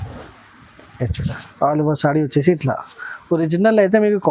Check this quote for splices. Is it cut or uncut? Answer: uncut